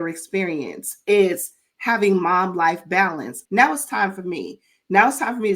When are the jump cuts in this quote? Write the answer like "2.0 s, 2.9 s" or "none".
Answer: 3.3 s